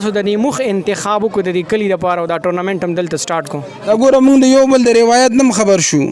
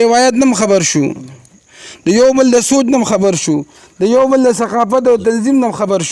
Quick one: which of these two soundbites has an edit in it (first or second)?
first